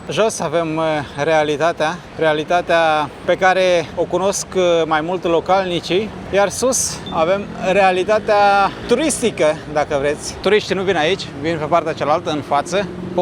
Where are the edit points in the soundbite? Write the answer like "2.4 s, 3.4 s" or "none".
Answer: none

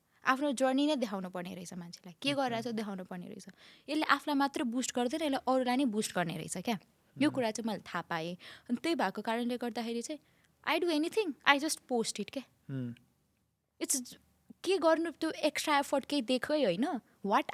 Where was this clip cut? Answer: none

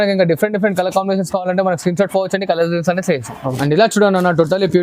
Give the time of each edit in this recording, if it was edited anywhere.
3.5 s

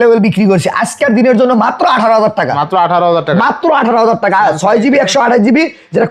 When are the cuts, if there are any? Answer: none

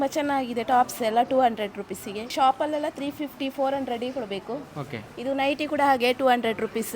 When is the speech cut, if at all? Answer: 2.3 s

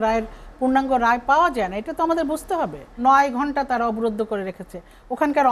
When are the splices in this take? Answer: 3.0 s

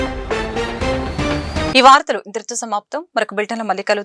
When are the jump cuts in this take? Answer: none

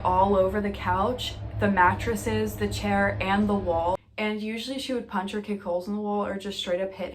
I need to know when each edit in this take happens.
4.1 s

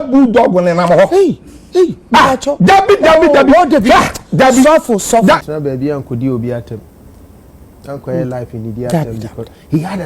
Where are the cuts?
5.5 s

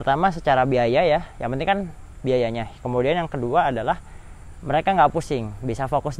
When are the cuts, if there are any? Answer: none

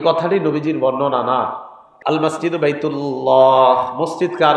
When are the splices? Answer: 1.9 s

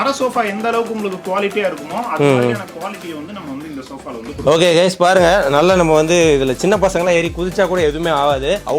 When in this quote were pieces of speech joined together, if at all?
none

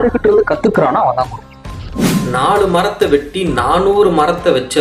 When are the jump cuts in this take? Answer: 1.7 s

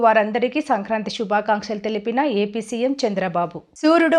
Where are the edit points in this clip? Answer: none

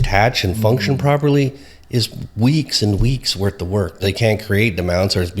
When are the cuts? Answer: 4.0 s

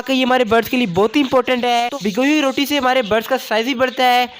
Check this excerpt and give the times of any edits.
1.9 s

